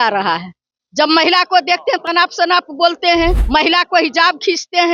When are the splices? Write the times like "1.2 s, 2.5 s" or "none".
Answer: 3.4 s